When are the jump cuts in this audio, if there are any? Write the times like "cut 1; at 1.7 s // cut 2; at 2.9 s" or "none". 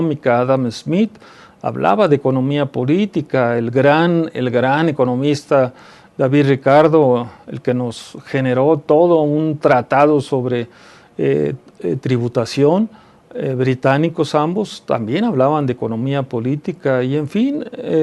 cut 1; at 9.8 s